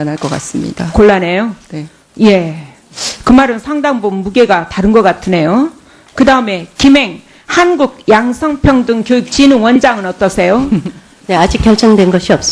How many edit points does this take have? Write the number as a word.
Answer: one